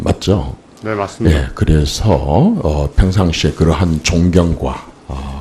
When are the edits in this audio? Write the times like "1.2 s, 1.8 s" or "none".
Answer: none